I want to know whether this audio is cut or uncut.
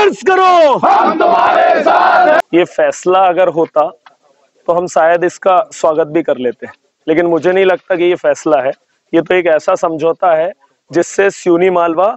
cut